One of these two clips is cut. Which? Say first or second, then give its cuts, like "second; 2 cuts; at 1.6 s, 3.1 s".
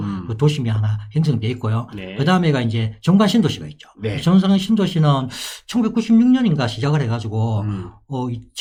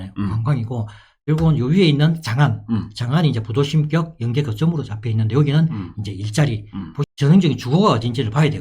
second; 1 cut; at 7.1 s